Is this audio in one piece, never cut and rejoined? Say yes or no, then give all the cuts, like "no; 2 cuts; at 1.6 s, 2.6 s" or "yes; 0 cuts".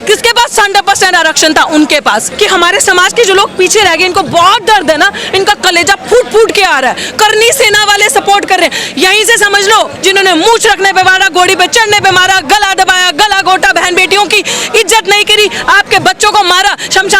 no; 2 cuts; at 2.3 s, 9.9 s